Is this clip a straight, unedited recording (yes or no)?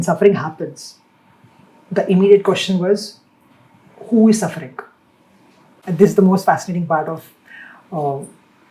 yes